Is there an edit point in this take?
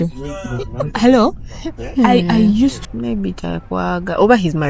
yes; 1 cut; at 2.8 s

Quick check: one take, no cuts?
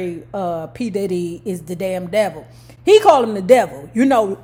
yes; 0 cuts

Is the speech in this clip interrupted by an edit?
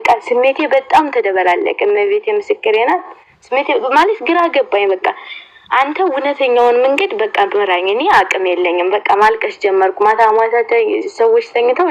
no; 0 cuts

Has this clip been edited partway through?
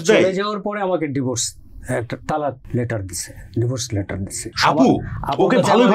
yes; 1 cut; at 4.5 s

